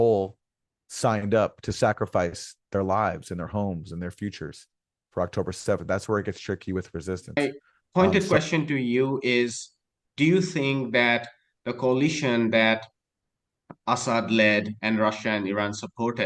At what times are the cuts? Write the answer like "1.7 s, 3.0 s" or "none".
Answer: 7.4 s